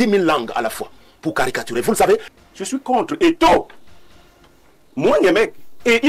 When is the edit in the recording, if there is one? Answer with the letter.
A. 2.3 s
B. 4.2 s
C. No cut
A